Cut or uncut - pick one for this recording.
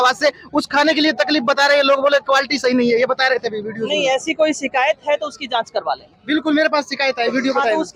uncut